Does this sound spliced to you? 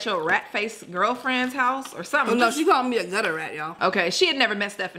yes; 1 cut; at 3.7 s

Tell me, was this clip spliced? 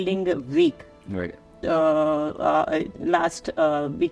no; 0 cuts

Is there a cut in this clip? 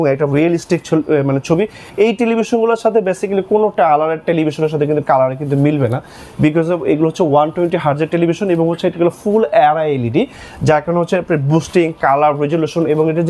no; 0 cuts

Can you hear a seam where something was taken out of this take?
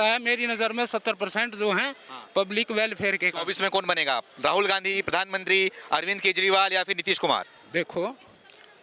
no; 0 cuts

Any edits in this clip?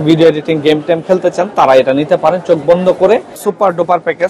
yes; 1 cut; at 3.4 s

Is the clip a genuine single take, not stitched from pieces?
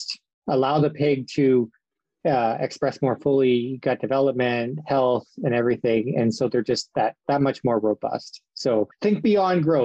no; 1 cut; at 8.9 s

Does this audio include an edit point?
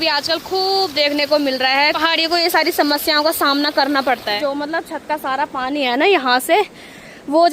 yes; 2 cuts; at 2.0 s, 4.4 s

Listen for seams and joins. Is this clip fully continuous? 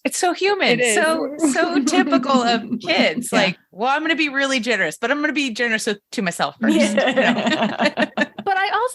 yes; 0 cuts

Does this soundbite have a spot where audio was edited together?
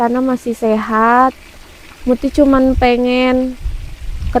no; 0 cuts

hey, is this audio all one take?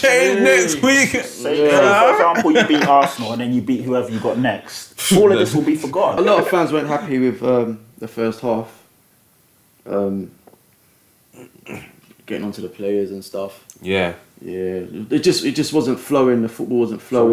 no; 1 cut; at 6.2 s

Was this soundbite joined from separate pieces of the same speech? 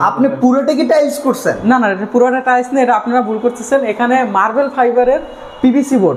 no; 0 cuts

